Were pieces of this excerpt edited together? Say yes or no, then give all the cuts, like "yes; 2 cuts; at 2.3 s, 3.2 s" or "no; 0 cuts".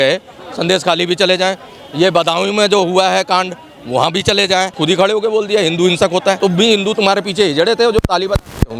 yes; 2 cuts; at 4.8 s, 6.4 s